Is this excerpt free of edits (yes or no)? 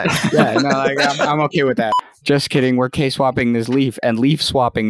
no